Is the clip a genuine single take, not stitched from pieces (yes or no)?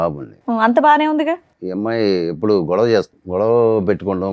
no